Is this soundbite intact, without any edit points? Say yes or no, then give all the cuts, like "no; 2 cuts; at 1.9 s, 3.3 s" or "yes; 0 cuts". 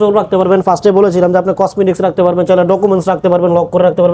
yes; 0 cuts